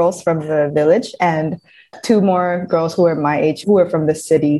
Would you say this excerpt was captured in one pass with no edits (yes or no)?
no